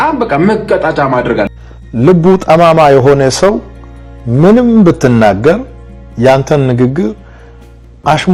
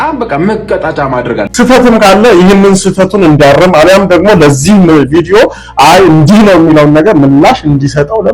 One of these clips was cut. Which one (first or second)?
second